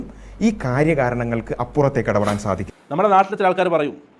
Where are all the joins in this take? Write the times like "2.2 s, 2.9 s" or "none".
2.7 s

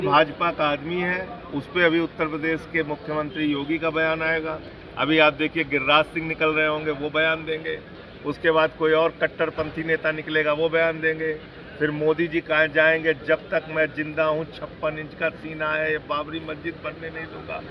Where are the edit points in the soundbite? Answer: none

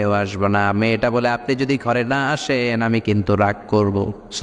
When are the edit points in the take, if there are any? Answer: none

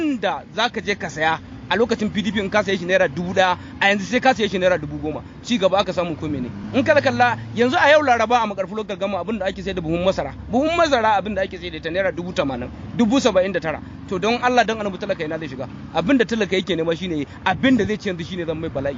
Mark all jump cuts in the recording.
none

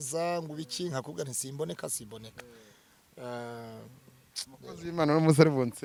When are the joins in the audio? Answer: none

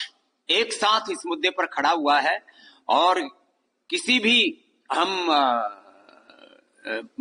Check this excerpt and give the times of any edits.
none

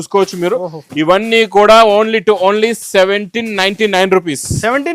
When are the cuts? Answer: none

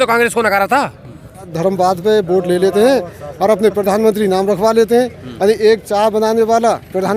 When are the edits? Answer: 1.5 s

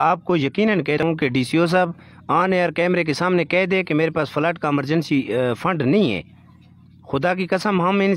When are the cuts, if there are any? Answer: 1.0 s

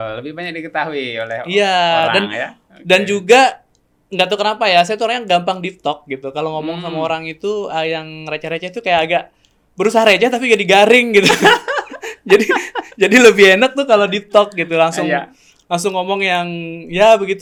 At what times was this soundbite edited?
none

